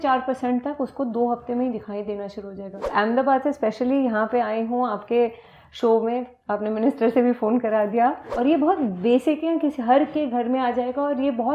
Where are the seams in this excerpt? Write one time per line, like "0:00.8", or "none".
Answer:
0:02.9
0:08.3